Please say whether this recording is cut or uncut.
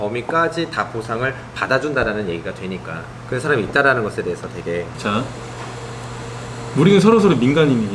cut